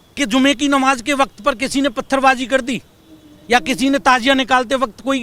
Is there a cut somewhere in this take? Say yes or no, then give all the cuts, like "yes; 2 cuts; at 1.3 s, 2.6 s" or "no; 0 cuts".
no; 0 cuts